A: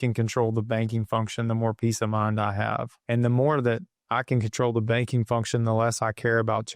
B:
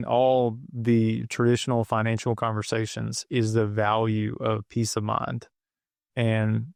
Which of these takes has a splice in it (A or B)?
A